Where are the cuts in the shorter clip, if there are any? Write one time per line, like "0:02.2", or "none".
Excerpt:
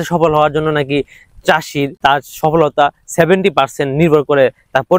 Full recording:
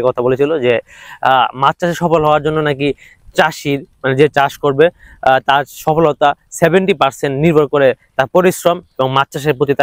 0:02.0